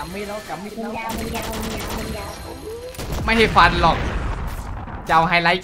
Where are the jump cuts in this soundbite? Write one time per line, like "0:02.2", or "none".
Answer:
none